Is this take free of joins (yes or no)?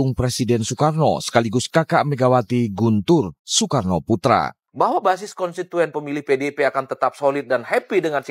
no